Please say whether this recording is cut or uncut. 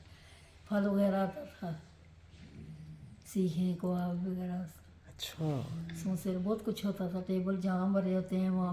uncut